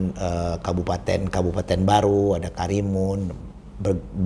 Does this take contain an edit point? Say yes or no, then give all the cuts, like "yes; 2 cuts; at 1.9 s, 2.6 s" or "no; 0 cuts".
no; 0 cuts